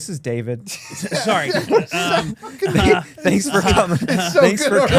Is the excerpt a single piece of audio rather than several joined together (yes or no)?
yes